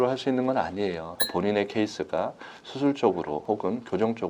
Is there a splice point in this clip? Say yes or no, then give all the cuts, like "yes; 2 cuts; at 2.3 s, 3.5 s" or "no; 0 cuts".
yes; 1 cut; at 1.2 s